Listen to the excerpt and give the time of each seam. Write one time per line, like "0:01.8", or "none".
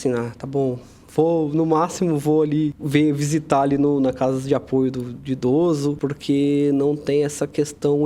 0:02.8
0:06.1